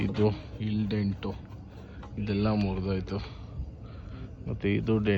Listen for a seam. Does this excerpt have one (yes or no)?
no